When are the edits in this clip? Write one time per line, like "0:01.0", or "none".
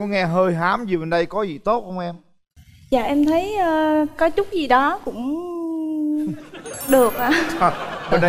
none